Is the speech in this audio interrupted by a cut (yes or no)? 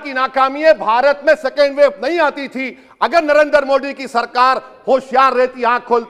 no